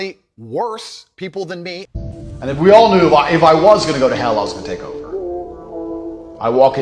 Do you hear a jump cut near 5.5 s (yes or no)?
no